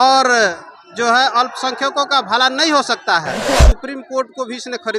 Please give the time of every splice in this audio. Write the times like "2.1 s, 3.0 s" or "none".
3.6 s

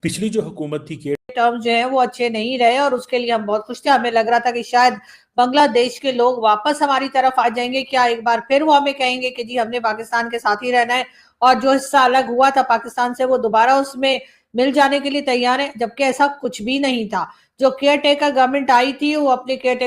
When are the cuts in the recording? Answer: 1.3 s

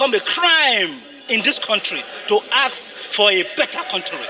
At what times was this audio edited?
none

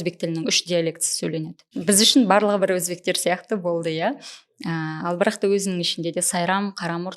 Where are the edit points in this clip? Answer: 1.8 s

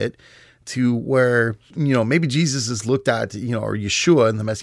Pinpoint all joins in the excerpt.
1.7 s

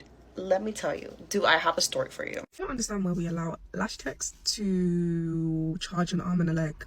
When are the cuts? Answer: 2.5 s

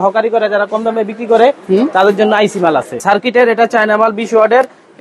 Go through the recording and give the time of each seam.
3.0 s

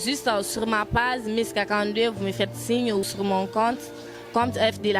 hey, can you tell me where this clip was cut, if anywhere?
3.1 s

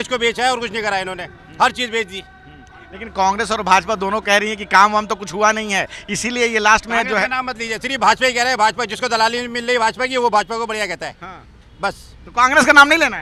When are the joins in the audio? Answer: none

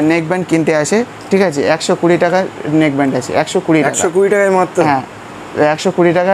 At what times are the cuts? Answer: none

